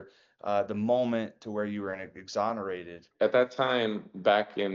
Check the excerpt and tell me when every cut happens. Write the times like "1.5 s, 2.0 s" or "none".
3.0 s

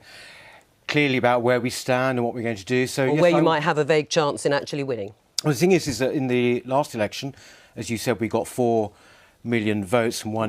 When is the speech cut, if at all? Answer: 9.3 s

